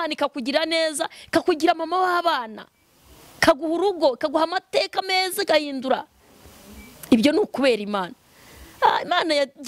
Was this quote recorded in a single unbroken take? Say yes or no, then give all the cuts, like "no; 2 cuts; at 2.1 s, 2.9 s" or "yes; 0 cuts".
yes; 0 cuts